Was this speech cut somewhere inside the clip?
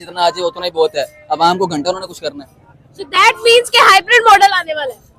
no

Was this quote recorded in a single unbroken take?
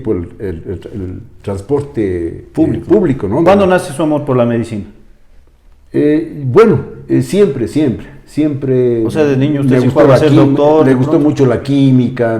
no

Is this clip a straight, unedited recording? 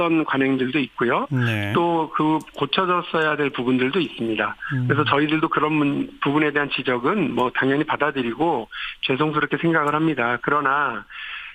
no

